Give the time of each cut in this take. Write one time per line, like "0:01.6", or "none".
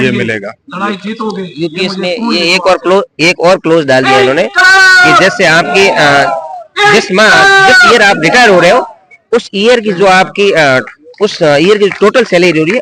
none